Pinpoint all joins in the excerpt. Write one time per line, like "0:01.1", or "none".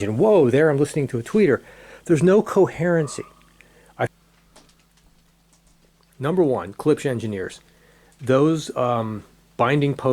0:04.1